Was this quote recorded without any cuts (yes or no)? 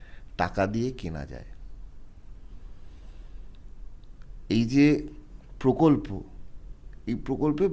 yes